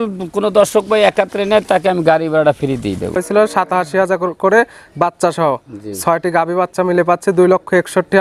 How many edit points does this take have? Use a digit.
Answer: 1